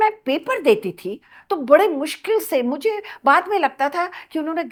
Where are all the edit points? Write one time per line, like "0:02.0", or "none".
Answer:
none